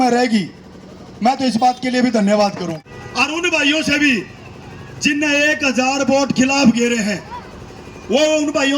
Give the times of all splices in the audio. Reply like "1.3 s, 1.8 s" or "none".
2.8 s

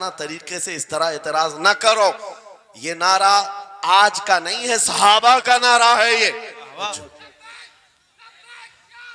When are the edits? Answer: 6.9 s

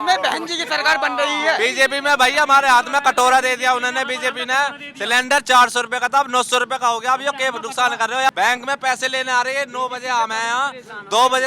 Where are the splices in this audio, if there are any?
1.6 s, 8.3 s

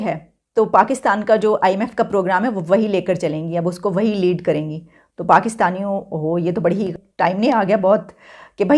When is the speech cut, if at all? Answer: 6.9 s

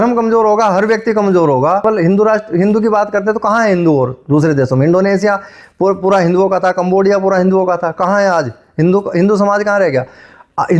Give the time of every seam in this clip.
1.8 s

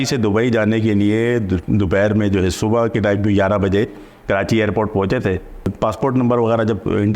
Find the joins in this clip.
5.7 s

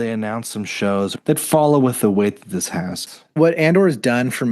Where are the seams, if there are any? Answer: 3.0 s

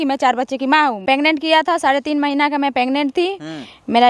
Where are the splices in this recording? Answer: 1.0 s

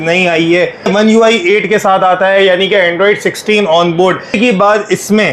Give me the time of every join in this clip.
0.9 s, 4.4 s

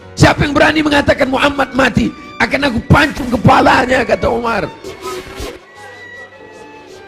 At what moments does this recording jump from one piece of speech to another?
4.9 s

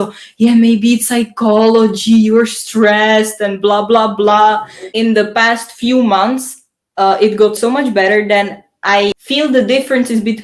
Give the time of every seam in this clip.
4.8 s, 7.6 s, 9.2 s

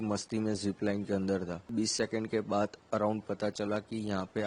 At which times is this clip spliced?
1.7 s

